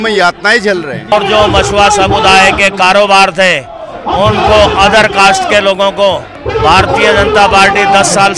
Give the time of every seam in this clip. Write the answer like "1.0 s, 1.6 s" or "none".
1.1 s, 6.3 s